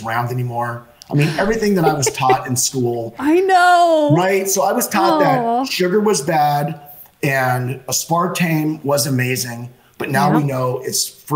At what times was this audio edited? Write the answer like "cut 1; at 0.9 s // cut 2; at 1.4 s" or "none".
none